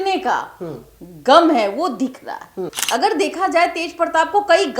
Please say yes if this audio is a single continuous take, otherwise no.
no